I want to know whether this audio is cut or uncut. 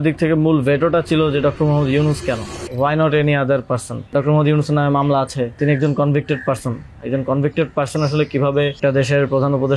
cut